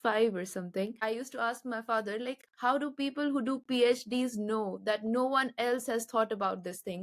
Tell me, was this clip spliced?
yes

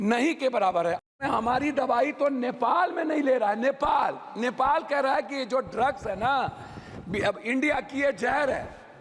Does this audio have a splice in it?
yes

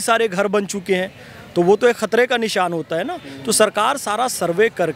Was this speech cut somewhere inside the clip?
no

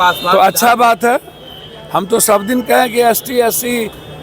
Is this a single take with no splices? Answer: yes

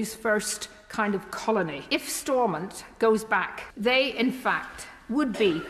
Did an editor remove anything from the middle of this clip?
yes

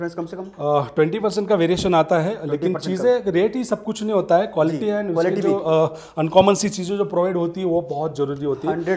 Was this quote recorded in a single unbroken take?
yes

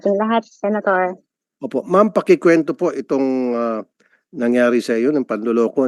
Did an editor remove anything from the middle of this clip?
no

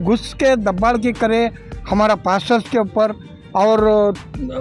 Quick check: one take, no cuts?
yes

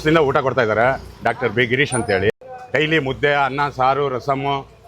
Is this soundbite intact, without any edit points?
no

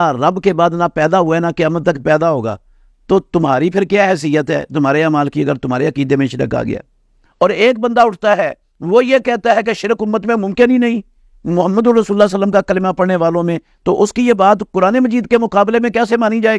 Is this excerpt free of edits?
no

